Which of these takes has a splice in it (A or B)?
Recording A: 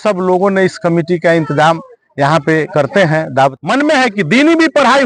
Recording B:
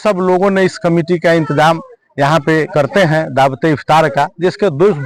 A